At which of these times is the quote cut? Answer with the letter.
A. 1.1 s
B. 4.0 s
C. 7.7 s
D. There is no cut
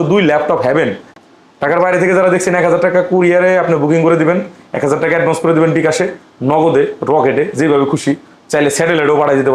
A